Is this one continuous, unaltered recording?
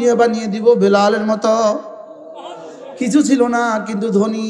yes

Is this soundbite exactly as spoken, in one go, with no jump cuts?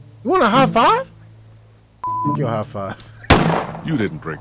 no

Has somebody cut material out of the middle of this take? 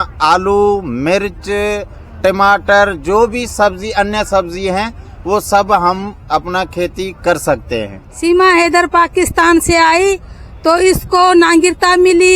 yes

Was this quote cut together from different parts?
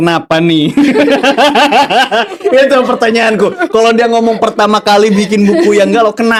no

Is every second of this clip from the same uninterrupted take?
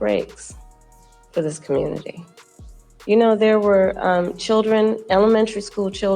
yes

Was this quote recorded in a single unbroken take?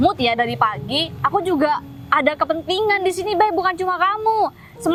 yes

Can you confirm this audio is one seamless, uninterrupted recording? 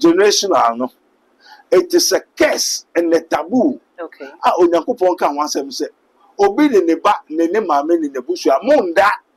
yes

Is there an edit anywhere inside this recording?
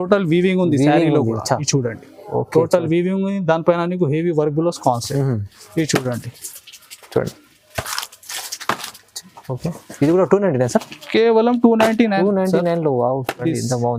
no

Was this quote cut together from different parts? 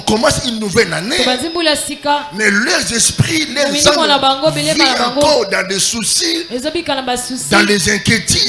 no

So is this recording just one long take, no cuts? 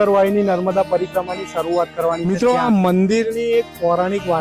no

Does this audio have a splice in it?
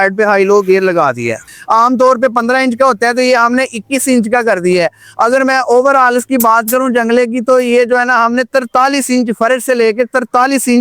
yes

